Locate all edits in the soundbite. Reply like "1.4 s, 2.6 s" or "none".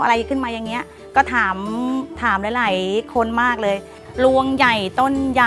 4.0 s